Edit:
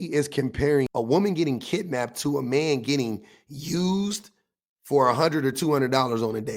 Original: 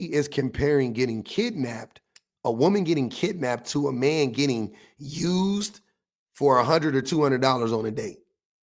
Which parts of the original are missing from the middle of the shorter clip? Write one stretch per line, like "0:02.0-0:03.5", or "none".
0:00.9-0:02.4